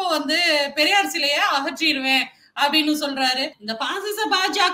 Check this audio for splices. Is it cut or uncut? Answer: cut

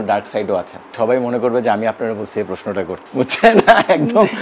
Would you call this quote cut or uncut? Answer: cut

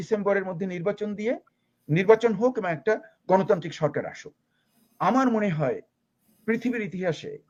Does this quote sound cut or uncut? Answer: uncut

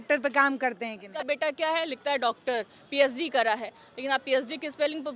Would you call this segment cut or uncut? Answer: cut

